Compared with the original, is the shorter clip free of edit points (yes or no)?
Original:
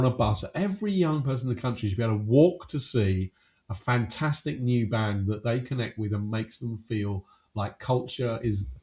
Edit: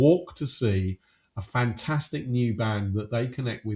yes